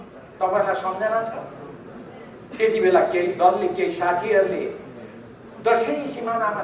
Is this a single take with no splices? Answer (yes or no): yes